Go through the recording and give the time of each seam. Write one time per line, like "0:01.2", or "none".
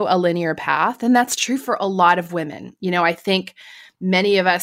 none